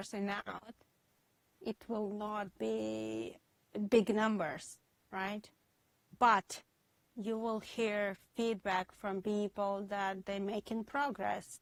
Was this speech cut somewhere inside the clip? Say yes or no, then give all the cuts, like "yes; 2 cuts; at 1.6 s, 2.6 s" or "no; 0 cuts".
no; 0 cuts